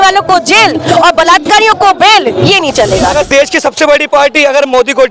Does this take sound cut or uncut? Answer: cut